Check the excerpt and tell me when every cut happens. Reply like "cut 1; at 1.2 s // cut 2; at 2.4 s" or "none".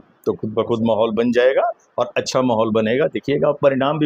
none

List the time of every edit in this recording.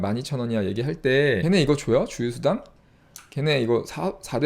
cut 1; at 1.4 s

